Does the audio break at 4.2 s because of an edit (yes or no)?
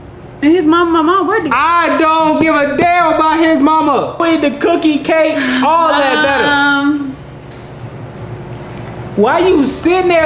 yes